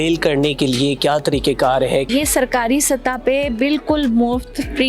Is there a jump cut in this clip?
yes; 1 cut; at 2.1 s

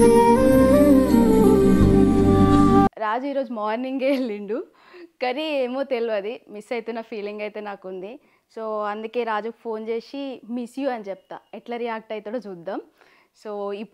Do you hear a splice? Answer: no; 0 cuts

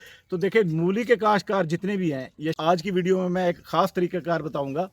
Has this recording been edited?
yes; 1 cut; at 2.5 s

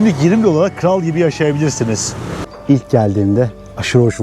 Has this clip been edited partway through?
yes; 1 cut; at 2.5 s

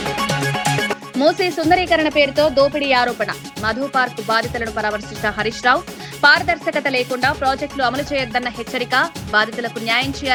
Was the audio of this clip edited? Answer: no; 0 cuts

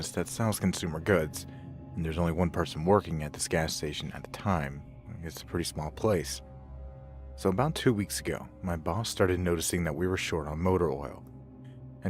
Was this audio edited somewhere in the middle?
yes; 1 cut; at 9.1 s

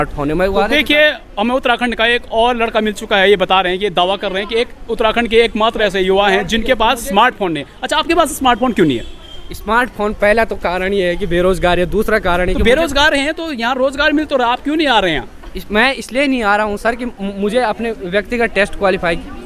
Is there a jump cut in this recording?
no; 0 cuts

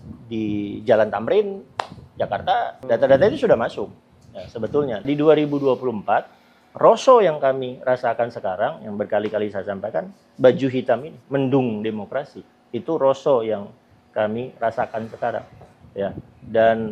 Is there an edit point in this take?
yes; 3 cuts; at 2.8 s, 5.1 s, 11.1 s

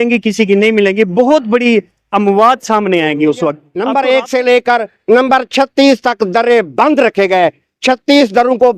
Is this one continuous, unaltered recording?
no; 1 cut; at 3.7 s

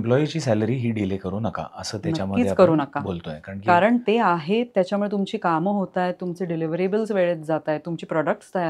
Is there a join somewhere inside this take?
no; 0 cuts

